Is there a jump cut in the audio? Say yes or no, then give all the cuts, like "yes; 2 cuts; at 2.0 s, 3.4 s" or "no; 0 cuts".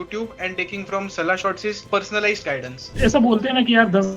yes; 2 cuts; at 1.8 s, 2.9 s